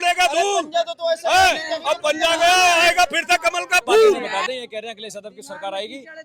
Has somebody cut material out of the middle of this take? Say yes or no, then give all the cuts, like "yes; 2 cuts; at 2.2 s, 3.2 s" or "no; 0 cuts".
yes; 1 cut; at 4.2 s